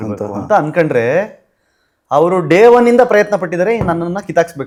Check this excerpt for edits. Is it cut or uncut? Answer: uncut